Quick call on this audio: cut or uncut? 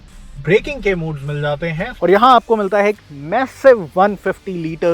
cut